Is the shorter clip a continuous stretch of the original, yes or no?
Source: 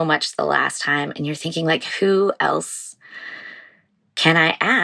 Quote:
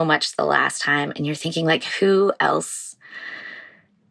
yes